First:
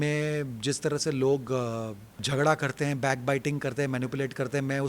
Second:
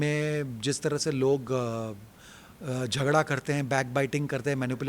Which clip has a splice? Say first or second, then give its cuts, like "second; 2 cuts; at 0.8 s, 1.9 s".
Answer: first; 1 cut; at 2.2 s